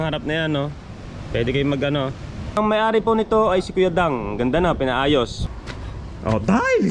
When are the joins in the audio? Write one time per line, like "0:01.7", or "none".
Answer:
0:02.6
0:05.4